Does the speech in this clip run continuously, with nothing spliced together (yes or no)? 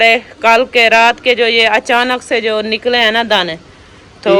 yes